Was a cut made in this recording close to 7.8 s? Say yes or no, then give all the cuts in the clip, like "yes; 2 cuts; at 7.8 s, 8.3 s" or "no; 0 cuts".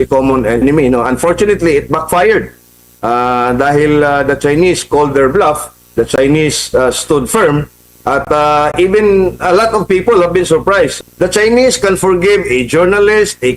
no; 1 cut; at 10.9 s